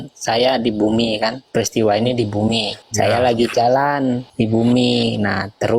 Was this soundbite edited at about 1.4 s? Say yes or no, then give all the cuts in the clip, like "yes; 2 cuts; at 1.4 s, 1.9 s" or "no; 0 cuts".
yes; 3 cuts; at 1.4 s, 2.8 s, 4.3 s